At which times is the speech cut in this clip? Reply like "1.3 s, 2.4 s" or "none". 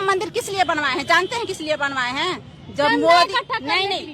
none